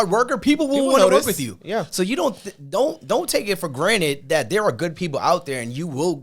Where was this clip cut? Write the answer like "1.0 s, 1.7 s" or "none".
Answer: none

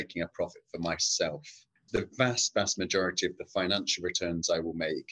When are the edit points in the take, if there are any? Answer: 1.7 s

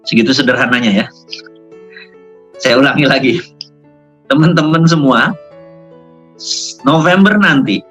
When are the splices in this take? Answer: none

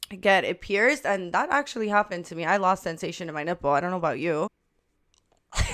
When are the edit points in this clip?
4.5 s

